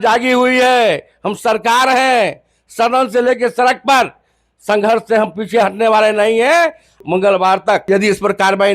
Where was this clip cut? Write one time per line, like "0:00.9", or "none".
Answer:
0:07.0
0:07.9